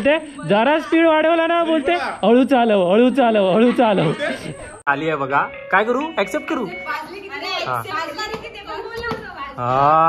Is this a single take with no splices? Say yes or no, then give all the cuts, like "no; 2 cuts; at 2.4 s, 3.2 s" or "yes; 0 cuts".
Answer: no; 1 cut; at 4.9 s